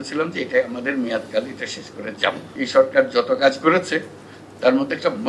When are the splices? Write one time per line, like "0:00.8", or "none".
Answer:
0:02.5